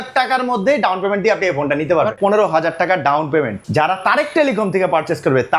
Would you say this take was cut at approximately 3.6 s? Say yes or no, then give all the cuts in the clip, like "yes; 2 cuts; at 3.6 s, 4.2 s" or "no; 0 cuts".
yes; 2 cuts; at 2.2 s, 3.6 s